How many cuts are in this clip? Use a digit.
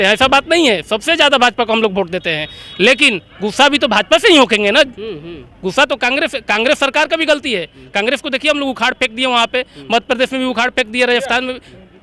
0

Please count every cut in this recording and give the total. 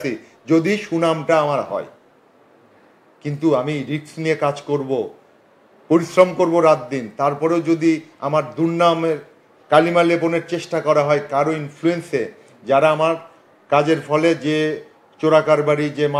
0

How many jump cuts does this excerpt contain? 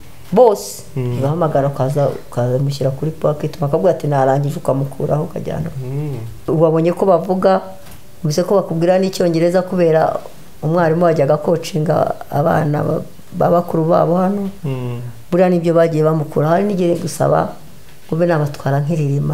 1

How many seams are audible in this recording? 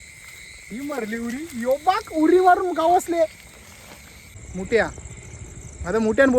1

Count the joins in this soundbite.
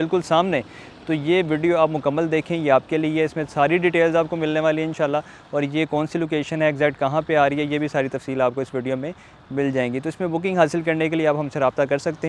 0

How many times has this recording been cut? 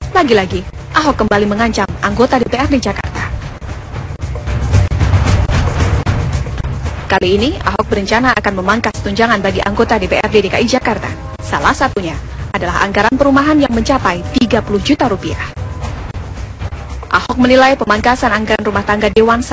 1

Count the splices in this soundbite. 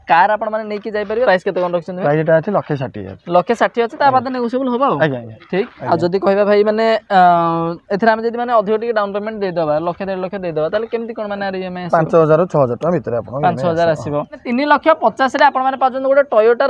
3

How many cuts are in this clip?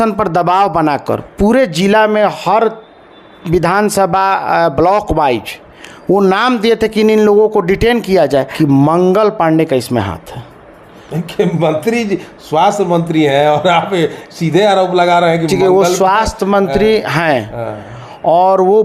2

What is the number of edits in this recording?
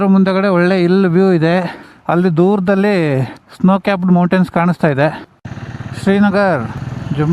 1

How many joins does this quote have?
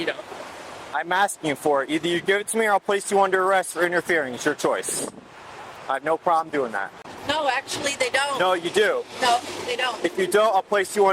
1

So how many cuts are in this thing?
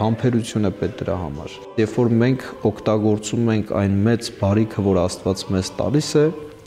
1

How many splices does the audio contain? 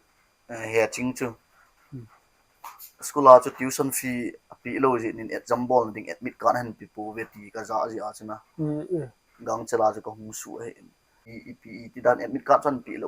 1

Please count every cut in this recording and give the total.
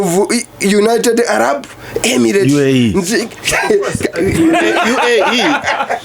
0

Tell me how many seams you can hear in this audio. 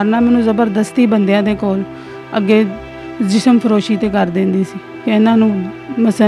0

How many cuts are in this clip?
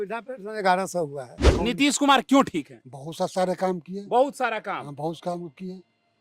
1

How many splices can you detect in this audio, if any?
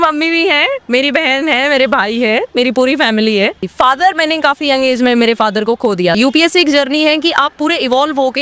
2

